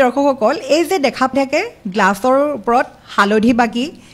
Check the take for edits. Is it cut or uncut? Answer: cut